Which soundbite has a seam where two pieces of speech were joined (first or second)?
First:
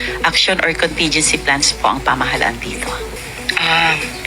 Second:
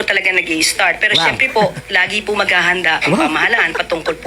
first